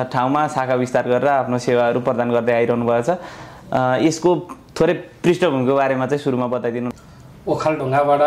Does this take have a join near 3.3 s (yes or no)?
no